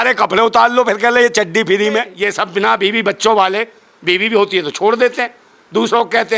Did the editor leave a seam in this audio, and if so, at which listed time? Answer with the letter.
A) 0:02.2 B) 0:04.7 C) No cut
A